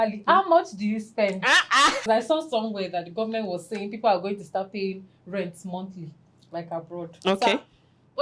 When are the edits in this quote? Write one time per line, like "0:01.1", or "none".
0:02.1